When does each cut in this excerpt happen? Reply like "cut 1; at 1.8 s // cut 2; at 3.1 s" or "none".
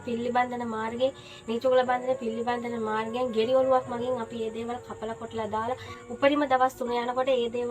cut 1; at 6.0 s